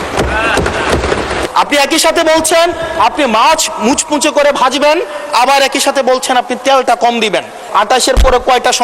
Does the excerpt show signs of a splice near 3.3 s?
no; 2 cuts; at 1.5 s, 7.6 s

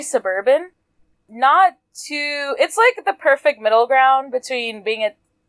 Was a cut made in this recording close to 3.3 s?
no; 1 cut; at 1.2 s

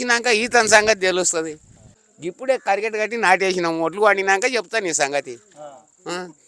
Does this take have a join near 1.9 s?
yes; 1 cut; at 1.9 s

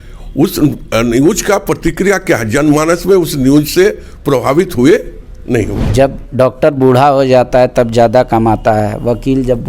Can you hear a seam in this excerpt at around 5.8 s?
yes; 1 cut; at 5.8 s

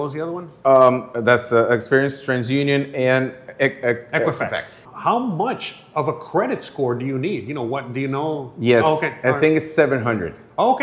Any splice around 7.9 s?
no; 1 cut; at 4.8 s

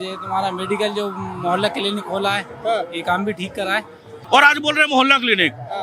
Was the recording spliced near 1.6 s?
no; 1 cut; at 4.2 s

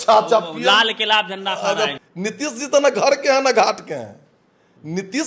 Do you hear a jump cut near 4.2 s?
no; 1 cut; at 2.0 s

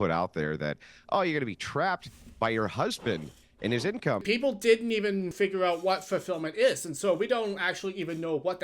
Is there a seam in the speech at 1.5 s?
no; 2 cuts; at 4.2 s, 5.3 s

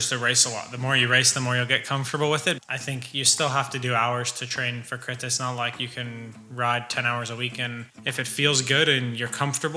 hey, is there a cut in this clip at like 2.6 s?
yes; 2 cuts; at 2.6 s, 7.9 s

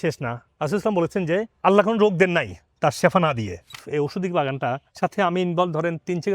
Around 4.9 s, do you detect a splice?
yes; 2 cuts; at 3.8 s, 4.9 s

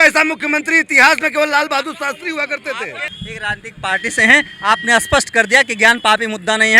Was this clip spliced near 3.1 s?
yes; 1 cut; at 3.1 s

